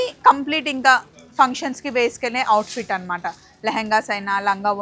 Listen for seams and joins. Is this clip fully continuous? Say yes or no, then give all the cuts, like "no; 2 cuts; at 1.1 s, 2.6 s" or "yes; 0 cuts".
yes; 0 cuts